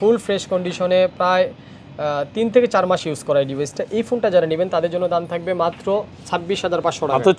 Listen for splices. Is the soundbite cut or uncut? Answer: uncut